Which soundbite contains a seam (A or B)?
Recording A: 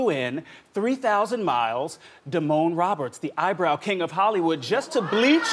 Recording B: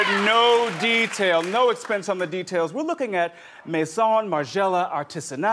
A